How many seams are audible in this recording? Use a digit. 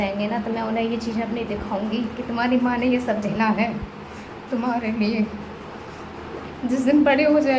0